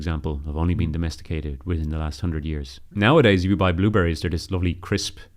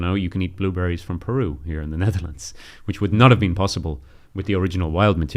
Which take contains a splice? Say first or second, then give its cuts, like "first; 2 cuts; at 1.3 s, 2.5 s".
first; 1 cut; at 2.7 s